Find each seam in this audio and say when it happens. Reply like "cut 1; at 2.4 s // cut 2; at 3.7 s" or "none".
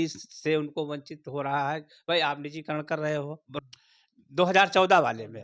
cut 1; at 3.5 s